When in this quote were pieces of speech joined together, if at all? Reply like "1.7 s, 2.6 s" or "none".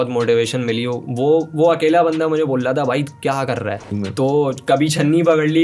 3.9 s